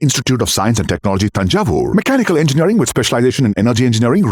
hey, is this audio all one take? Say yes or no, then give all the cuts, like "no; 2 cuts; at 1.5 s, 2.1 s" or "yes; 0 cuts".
yes; 0 cuts